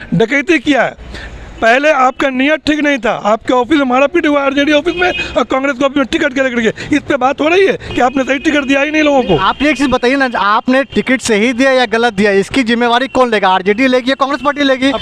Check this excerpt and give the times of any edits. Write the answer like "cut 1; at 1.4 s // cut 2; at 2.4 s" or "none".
none